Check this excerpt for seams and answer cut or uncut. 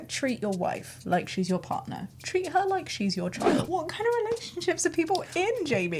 cut